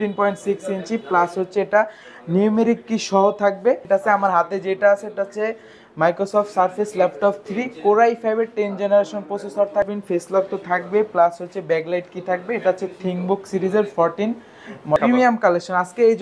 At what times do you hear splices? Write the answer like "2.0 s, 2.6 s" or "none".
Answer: 3.8 s, 9.9 s, 15.0 s

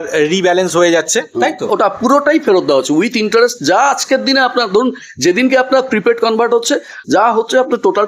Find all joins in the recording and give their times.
none

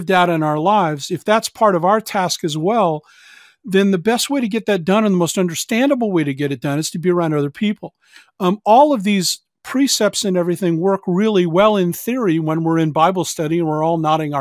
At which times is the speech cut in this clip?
none

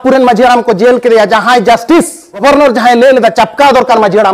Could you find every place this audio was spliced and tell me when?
2.4 s

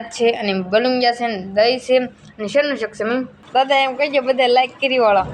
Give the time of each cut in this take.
3.4 s

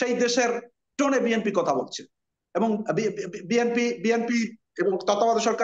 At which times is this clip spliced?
none

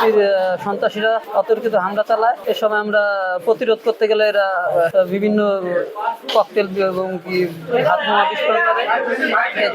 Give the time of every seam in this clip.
1.3 s, 2.4 s, 4.9 s

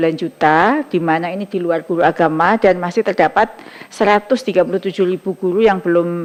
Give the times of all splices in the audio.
none

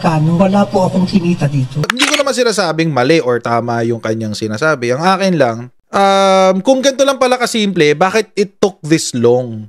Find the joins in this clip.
1.9 s

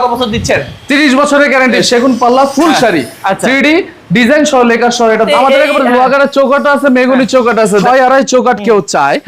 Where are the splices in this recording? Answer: 1.8 s, 5.2 s, 7.8 s

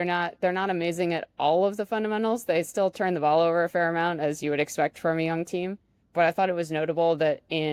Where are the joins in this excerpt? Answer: none

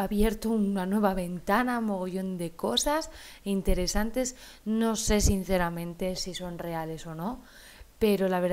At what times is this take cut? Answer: 6.1 s

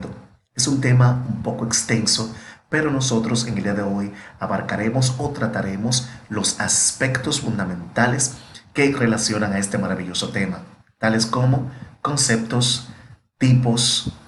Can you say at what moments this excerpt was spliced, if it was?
none

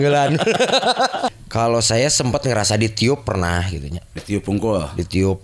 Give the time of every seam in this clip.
1.4 s

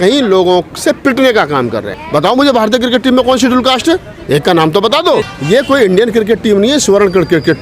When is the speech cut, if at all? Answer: 2.0 s, 5.3 s

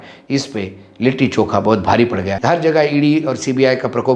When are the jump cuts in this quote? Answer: 2.3 s

